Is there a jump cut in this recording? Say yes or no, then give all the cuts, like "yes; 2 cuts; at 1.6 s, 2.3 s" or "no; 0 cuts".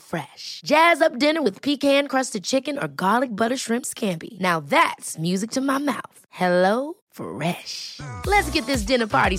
no; 0 cuts